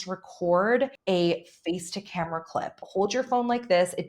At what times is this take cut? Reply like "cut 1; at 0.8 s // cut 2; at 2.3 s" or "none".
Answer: cut 1; at 1.0 s // cut 2; at 2.8 s

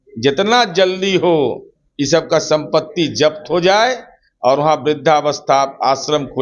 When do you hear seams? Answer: none

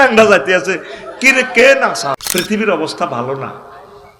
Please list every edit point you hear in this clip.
cut 1; at 2.2 s

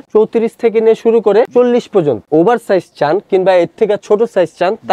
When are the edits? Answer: cut 1; at 2.3 s

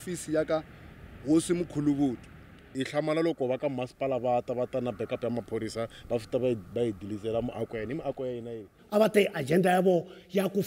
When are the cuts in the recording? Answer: cut 1; at 2.8 s // cut 2; at 8.7 s

